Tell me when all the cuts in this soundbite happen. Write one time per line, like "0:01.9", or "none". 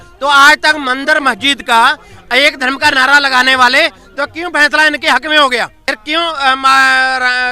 0:05.8